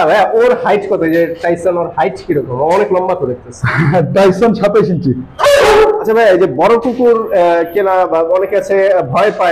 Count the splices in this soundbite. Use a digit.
1